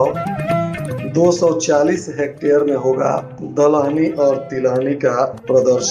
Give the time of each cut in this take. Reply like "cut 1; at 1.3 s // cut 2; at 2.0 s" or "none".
none